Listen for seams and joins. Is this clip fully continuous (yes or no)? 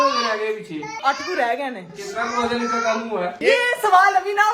no